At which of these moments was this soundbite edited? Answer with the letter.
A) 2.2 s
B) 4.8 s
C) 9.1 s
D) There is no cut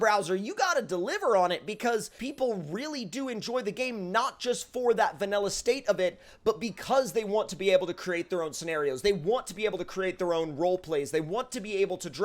A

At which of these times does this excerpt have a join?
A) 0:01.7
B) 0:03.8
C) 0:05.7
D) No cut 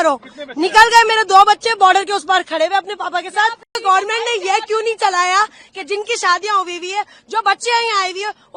B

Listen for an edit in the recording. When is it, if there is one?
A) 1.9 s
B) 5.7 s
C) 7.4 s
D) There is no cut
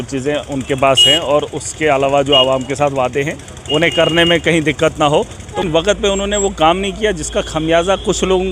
B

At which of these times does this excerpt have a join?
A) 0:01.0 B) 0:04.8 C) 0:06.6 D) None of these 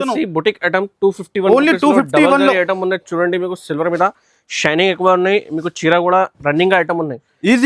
D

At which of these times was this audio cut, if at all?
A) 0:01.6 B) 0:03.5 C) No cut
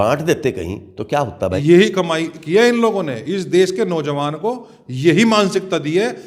A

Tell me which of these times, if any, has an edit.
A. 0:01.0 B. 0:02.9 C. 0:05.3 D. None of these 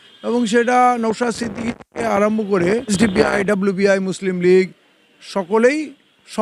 B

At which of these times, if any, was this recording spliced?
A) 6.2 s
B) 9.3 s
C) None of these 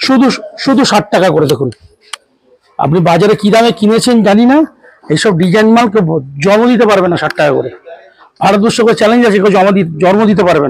C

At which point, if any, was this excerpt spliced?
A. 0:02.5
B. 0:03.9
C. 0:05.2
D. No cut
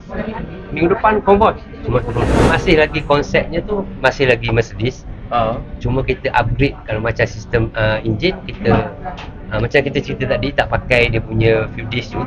A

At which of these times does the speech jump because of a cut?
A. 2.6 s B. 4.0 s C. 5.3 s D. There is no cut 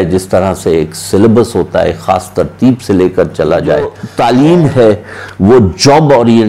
B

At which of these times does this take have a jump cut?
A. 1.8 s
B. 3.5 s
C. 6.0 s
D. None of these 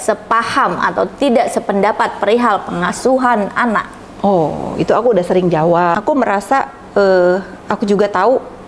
C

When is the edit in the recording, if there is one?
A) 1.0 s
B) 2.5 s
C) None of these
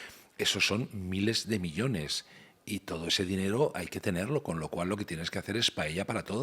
C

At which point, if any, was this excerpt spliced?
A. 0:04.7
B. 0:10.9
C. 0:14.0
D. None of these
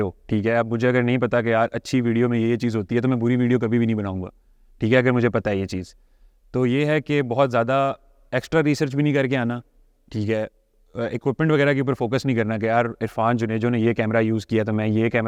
D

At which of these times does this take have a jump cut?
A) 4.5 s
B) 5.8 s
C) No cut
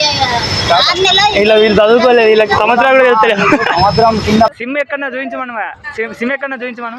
A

